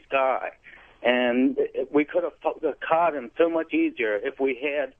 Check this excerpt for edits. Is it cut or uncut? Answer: cut